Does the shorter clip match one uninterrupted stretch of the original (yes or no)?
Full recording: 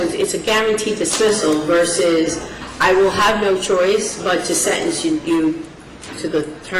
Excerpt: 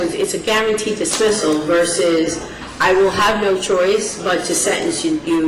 yes